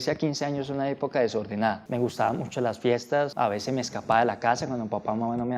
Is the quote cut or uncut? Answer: cut